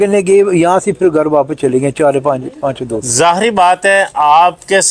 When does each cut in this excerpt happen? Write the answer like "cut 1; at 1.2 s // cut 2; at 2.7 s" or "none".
none